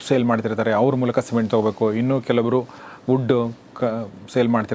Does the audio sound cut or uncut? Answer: uncut